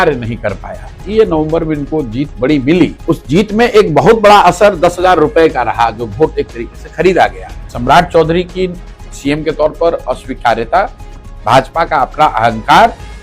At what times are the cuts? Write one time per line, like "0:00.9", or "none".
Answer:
0:01.0
0:03.0
0:07.7